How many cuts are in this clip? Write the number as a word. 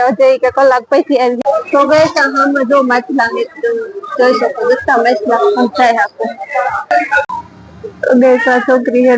two